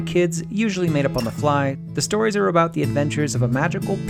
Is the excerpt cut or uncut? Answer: cut